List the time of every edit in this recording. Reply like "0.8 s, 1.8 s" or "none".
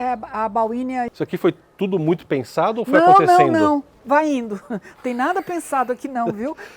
1.2 s